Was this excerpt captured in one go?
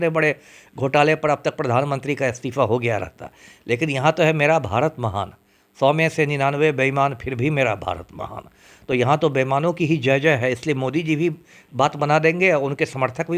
yes; 0 cuts

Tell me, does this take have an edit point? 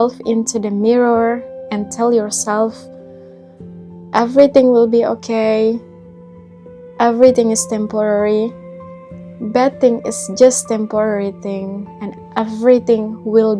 no; 0 cuts

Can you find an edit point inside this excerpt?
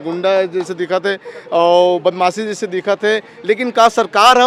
no; 0 cuts

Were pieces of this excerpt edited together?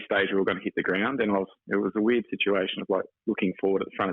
yes; 1 cut; at 1.6 s

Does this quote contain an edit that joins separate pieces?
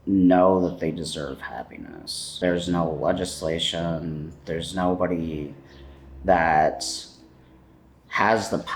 yes; 1 cut; at 2.2 s

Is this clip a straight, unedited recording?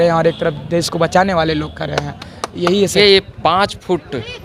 no; 1 cut; at 2.9 s

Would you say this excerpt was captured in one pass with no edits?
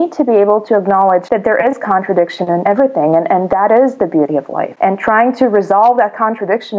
no; 3 cuts; at 1.2 s, 2.7 s, 4.6 s

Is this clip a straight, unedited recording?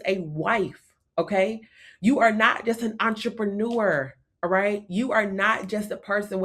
yes; 0 cuts

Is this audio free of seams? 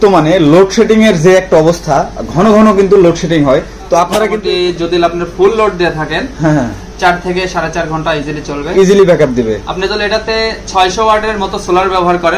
no; 1 cut; at 3.9 s

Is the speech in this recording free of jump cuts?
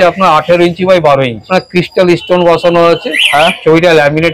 no; 1 cut; at 1.5 s

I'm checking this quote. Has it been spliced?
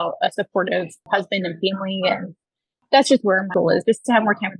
yes; 3 cuts; at 1.0 s, 2.8 s, 3.5 s

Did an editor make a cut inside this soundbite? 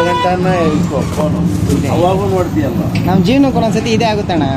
no; 0 cuts

